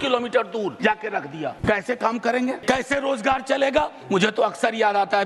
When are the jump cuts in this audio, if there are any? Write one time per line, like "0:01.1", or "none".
0:01.1
0:02.6
0:04.0